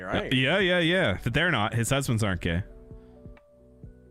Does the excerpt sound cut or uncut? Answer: uncut